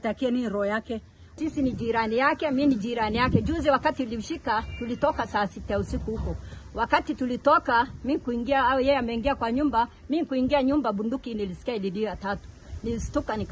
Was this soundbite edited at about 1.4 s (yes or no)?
yes